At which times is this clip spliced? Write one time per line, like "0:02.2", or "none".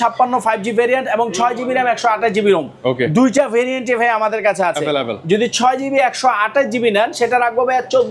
none